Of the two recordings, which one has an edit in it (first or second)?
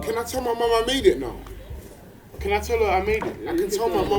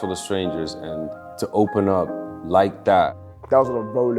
second